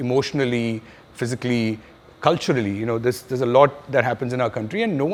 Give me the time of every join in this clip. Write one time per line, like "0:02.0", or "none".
none